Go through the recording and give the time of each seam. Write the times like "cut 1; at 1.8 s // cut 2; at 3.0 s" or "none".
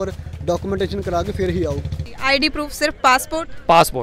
cut 1; at 1.9 s